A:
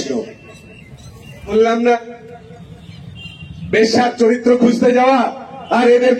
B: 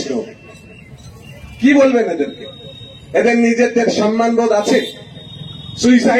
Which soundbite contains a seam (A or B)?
A